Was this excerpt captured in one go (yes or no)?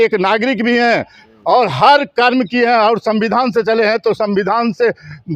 yes